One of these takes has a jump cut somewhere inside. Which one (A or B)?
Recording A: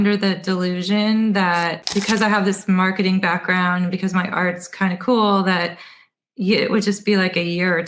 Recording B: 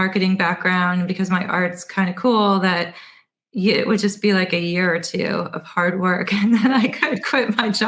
A